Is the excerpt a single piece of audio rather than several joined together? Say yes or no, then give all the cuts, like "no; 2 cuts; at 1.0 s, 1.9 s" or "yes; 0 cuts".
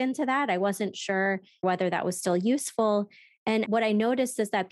no; 2 cuts; at 1.6 s, 3.7 s